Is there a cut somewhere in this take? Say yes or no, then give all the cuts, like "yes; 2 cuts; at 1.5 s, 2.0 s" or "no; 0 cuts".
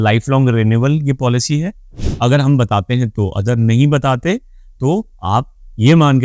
yes; 1 cut; at 2.0 s